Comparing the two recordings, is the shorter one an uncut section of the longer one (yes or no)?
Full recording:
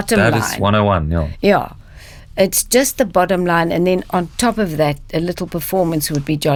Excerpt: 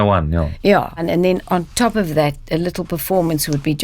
no